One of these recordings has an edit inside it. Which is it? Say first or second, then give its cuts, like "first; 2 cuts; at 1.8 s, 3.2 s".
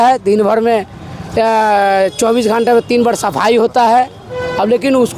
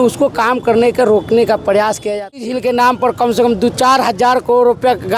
second; 1 cut; at 2.3 s